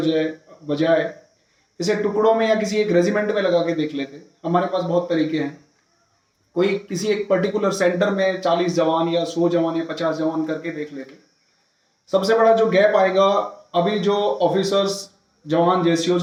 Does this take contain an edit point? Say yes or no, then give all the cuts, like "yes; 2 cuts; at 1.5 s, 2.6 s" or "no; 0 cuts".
no; 0 cuts